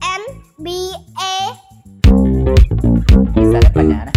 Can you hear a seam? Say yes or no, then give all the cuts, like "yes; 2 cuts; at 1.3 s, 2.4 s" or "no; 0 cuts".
yes; 1 cut; at 1.8 s